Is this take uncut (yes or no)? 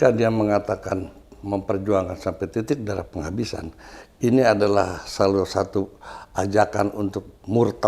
yes